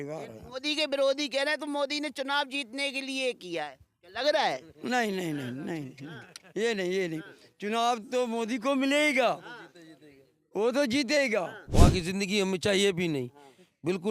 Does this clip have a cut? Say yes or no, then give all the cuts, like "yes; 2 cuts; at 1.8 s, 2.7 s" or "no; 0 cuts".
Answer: yes; 1 cut; at 11.6 s